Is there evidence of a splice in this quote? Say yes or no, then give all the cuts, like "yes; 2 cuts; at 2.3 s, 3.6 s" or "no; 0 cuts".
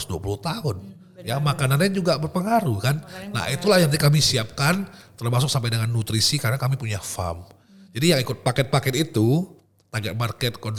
no; 0 cuts